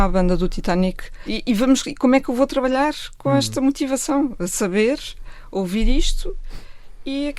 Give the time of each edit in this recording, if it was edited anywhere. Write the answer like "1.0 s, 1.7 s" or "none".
1.2 s